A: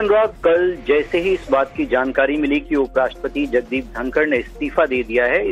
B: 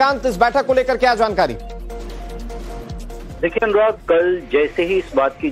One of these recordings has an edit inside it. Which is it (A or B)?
B